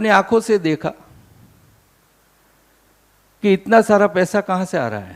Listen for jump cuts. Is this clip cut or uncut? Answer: uncut